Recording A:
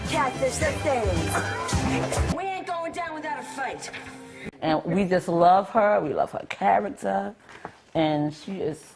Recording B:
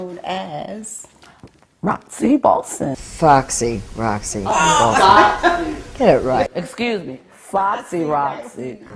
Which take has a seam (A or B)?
A